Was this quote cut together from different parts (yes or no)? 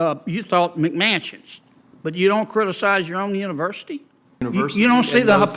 yes